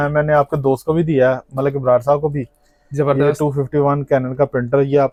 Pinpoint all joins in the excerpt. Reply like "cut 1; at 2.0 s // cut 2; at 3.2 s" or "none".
none